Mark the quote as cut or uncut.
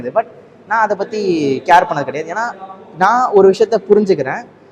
uncut